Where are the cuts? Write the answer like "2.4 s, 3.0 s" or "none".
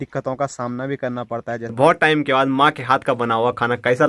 1.7 s